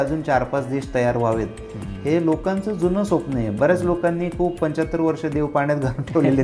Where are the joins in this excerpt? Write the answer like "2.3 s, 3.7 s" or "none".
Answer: none